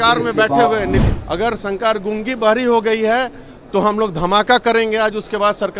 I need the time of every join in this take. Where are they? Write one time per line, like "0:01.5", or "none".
0:01.0